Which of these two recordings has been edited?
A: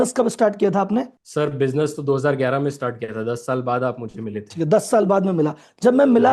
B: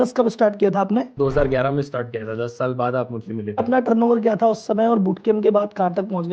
B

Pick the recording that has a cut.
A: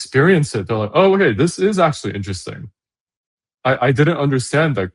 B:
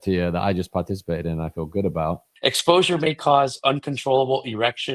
B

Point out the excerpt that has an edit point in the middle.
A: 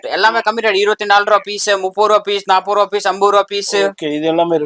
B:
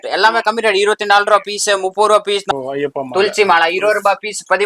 B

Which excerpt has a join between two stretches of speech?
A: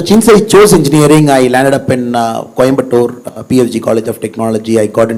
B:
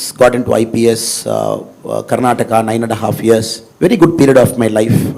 B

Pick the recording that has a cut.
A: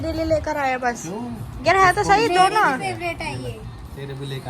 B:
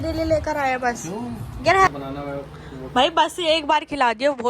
B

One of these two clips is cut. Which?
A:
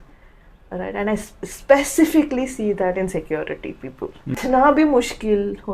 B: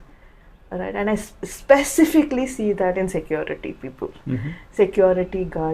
A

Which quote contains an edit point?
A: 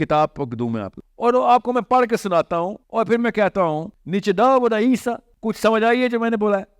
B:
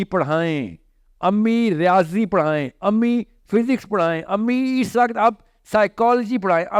A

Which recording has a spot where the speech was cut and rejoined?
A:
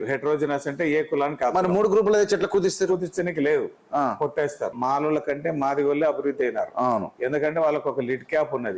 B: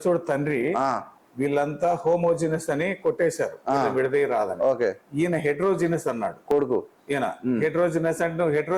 A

